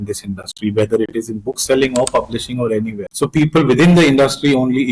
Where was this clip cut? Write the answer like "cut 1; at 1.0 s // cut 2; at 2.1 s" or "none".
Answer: cut 1; at 3.0 s